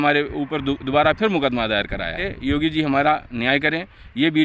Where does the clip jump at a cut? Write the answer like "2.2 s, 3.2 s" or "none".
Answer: 2.3 s